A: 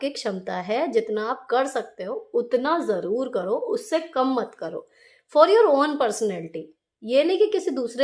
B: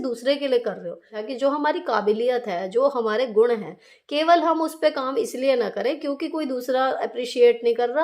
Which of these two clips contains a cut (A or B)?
B